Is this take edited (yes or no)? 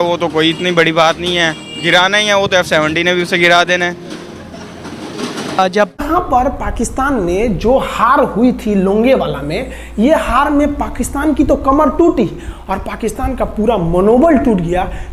no